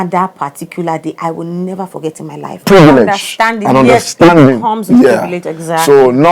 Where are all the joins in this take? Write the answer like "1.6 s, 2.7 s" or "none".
2.6 s